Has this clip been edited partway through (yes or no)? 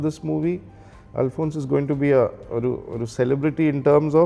no